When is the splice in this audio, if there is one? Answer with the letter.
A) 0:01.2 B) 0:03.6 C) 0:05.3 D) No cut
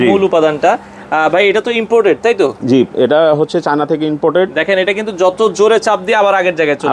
D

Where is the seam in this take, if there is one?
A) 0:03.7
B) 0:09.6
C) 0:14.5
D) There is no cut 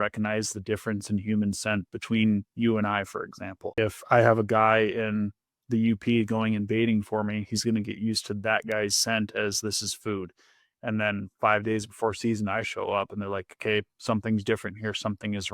A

